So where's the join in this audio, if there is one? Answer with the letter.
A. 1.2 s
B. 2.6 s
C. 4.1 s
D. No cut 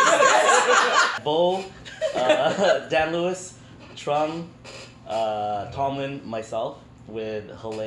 A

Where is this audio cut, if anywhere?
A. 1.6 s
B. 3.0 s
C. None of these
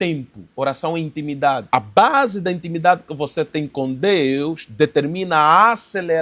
A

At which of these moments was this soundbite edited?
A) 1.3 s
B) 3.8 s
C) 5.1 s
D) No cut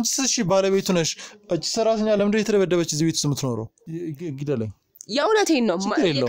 B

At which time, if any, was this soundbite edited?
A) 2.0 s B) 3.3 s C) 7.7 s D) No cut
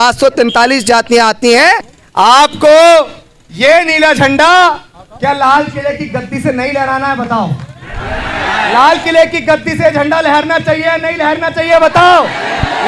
A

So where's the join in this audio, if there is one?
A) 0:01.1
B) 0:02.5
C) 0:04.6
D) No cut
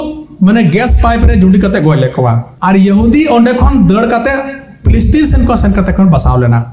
B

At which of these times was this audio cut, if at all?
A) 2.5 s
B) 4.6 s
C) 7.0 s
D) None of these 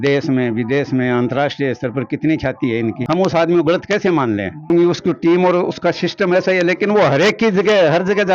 D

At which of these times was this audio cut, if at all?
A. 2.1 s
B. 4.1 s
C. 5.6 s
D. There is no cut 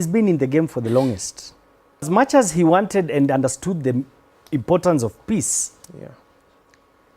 A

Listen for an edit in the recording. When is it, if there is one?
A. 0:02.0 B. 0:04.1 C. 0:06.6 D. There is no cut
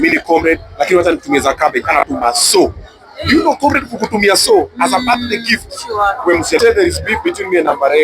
C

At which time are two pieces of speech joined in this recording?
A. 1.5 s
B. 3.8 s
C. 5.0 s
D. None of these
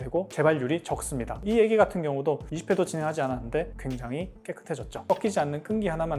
C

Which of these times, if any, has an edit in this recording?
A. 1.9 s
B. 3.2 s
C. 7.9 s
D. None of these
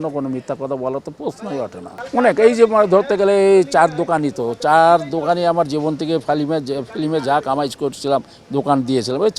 A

